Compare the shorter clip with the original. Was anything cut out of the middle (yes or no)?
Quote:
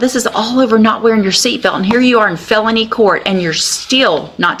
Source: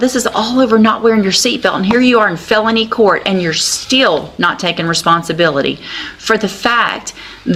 no